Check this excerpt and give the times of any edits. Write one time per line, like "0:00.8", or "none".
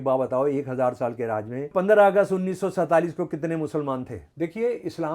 0:01.7
0:04.2

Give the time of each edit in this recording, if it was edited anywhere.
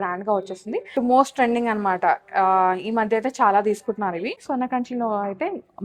0:00.9
0:04.4

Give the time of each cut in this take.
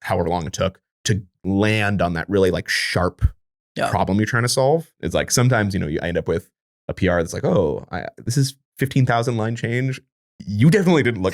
0:05.0
0:08.6

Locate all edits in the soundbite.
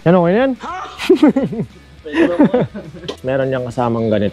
0:03.1

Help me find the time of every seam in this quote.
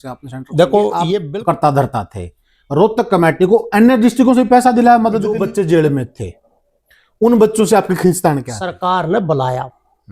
0:01.2
0:05.3
0:08.6

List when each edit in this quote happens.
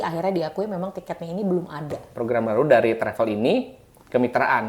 0:02.0

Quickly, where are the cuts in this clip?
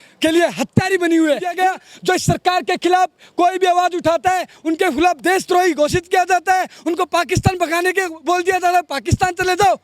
0:01.5

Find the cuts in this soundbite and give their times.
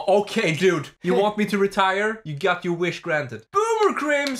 0:00.9
0:02.3
0:03.4

